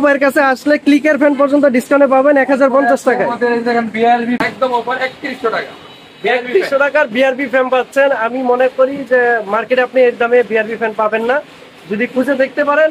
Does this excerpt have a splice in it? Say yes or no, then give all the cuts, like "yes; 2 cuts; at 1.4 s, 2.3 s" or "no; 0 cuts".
yes; 1 cut; at 4.4 s